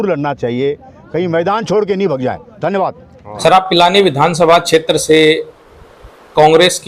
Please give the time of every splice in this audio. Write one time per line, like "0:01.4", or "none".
none